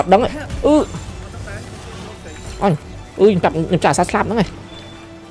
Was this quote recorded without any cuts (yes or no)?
yes